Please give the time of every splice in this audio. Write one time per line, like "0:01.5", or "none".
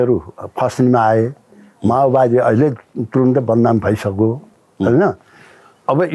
none